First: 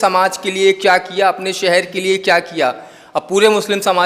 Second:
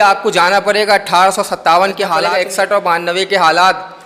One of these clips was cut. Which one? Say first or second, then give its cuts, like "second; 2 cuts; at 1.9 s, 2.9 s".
second; 1 cut; at 2.2 s